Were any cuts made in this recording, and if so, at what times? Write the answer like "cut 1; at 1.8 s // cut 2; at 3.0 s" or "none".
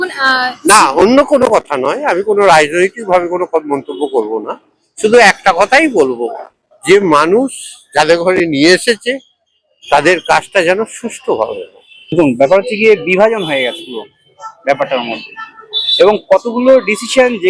cut 1; at 12.1 s